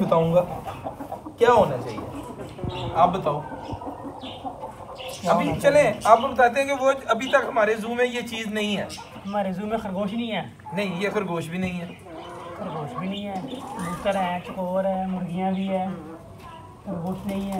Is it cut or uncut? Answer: uncut